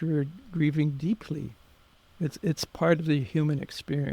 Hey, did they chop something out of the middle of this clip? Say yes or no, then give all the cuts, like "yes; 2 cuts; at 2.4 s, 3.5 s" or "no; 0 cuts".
no; 0 cuts